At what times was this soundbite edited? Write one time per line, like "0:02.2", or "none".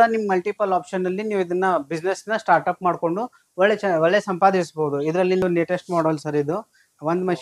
0:05.4

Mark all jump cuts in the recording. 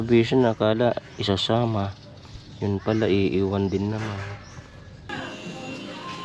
0:05.1

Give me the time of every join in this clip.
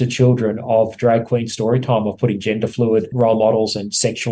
0:03.1

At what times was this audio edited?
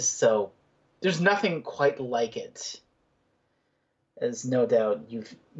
none

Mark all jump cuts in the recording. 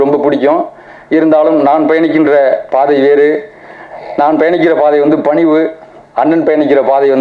none

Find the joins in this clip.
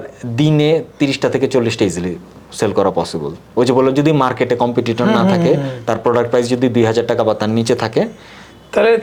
none

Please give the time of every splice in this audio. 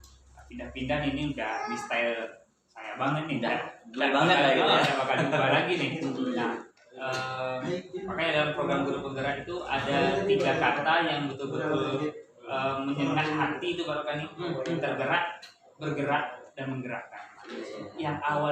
none

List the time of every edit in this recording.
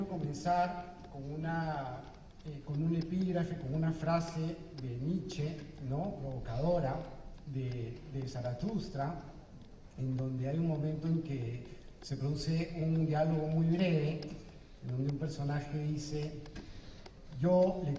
0:07.4

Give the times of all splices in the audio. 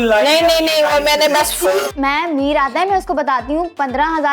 0:01.9

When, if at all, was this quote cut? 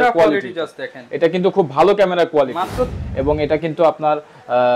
0:03.0

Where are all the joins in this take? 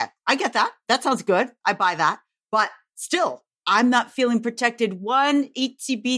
none

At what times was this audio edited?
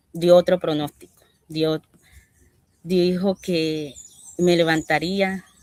none

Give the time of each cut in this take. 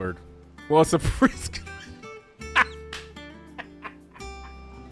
none

